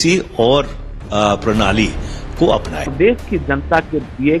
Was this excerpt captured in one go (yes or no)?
no